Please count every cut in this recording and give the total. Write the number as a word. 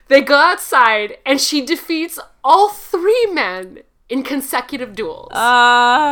zero